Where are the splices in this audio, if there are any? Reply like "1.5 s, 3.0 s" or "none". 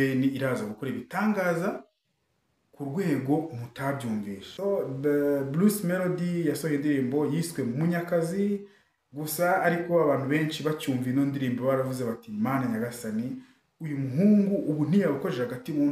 4.4 s